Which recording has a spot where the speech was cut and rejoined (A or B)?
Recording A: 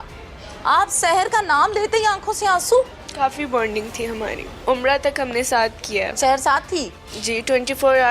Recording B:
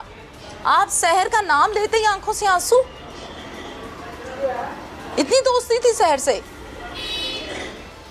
A